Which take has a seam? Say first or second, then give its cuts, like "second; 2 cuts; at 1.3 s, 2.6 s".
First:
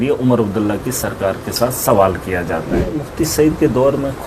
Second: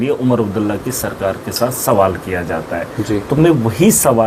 first; 1 cut; at 2.9 s